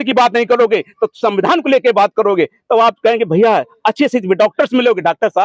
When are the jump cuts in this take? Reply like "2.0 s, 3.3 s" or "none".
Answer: none